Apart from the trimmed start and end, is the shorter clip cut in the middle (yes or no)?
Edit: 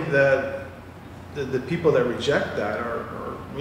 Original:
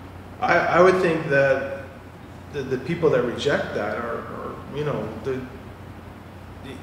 no